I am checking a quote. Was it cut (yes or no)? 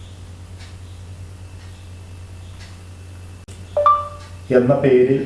yes